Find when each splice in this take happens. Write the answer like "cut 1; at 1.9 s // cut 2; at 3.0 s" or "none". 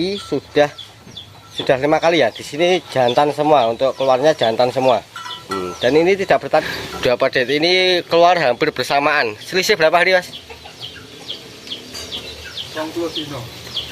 cut 1; at 6.6 s